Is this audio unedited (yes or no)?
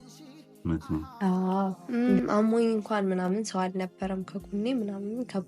no